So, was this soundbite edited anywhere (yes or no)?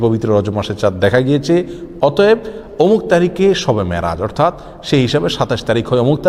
no